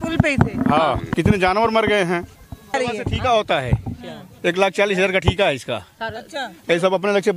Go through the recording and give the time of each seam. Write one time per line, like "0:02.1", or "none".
0:01.1
0:02.7